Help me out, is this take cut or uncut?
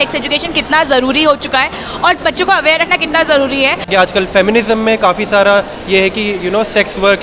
cut